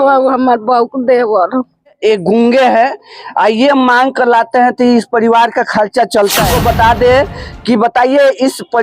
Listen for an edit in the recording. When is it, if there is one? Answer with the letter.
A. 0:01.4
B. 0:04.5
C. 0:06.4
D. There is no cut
C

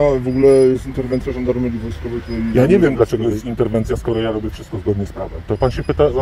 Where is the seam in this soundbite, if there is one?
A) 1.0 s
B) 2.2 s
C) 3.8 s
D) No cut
D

